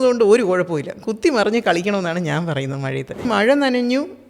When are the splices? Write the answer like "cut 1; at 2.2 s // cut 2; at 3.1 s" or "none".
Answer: cut 1; at 3.2 s